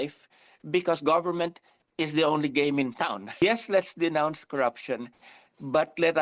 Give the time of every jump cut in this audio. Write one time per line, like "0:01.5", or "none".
none